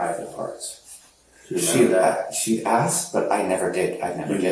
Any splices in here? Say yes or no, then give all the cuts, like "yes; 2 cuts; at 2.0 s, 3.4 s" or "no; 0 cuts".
no; 0 cuts